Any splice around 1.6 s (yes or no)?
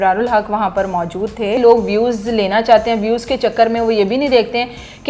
yes